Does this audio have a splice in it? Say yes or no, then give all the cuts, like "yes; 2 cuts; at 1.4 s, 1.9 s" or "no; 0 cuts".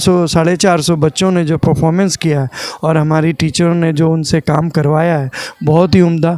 no; 0 cuts